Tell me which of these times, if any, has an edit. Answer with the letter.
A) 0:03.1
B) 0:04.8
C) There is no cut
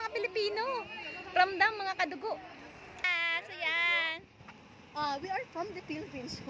A